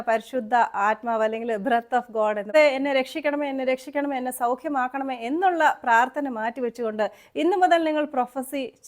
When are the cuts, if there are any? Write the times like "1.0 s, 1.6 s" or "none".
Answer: 2.5 s

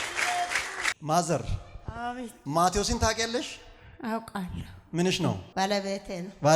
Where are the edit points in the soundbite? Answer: 1.0 s, 5.5 s

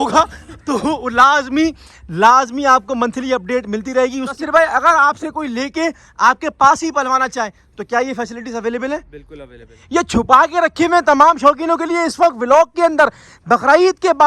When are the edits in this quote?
4.3 s, 9.8 s

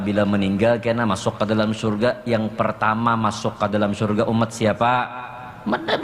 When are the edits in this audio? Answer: none

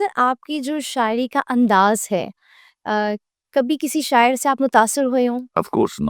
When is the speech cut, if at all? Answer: none

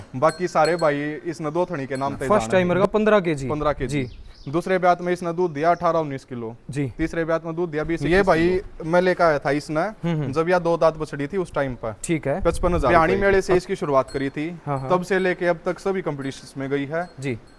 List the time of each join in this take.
2.3 s, 8.0 s, 12.9 s

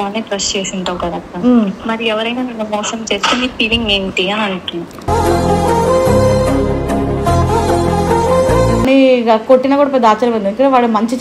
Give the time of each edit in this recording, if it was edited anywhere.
8.9 s

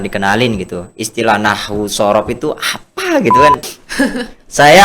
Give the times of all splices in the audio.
3.7 s

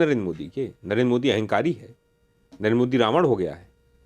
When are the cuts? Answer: none

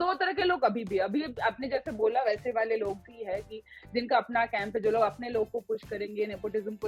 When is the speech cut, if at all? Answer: none

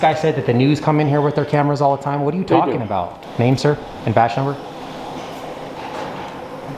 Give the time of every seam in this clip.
3.1 s

